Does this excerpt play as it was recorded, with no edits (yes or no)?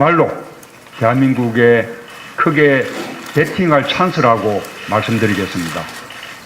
no